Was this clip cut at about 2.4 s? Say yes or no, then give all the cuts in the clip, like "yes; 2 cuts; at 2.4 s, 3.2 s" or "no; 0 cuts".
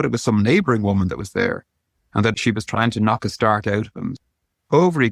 yes; 2 cuts; at 2.4 s, 4.2 s